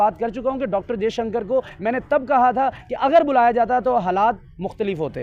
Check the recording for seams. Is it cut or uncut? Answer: uncut